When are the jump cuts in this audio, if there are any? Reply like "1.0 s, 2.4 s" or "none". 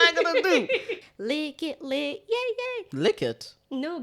1.0 s